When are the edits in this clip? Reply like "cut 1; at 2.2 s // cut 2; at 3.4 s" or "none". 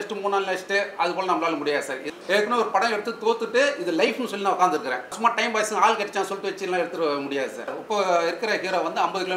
cut 1; at 2.1 s // cut 2; at 5.2 s // cut 3; at 7.7 s